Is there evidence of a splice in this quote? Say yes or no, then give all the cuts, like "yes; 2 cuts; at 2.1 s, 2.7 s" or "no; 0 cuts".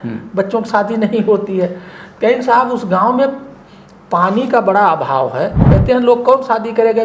yes; 1 cut; at 5.7 s